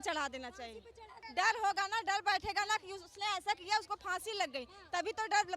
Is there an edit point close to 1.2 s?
yes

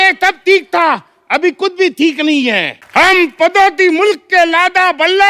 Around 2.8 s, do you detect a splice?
yes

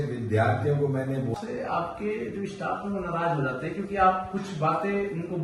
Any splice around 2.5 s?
no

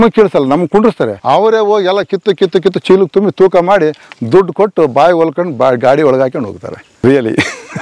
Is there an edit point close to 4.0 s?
no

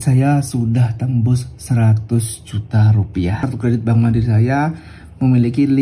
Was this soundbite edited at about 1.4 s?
no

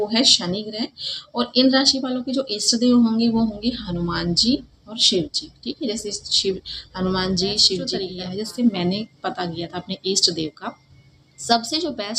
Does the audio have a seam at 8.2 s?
yes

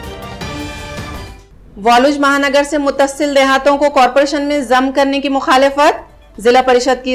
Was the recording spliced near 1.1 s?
yes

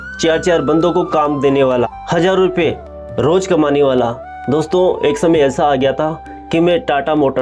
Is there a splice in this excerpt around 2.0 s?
yes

